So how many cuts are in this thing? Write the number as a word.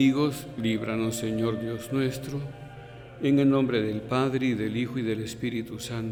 zero